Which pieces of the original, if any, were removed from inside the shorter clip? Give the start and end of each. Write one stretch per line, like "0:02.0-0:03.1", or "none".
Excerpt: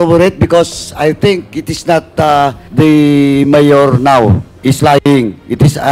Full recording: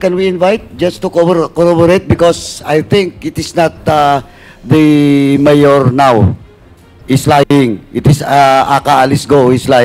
0:04.3-0:04.6
0:06.4-0:06.9